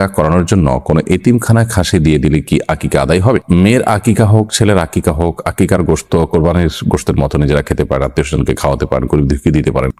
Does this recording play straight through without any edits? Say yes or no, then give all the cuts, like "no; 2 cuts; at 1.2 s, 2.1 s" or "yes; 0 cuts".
yes; 0 cuts